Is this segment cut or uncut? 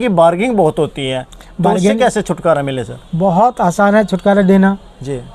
uncut